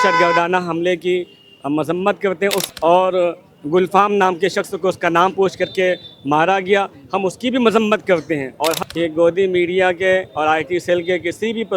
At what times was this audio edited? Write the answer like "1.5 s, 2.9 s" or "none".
2.6 s, 8.8 s